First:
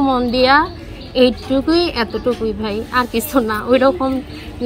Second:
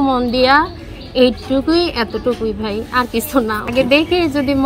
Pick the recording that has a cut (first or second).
second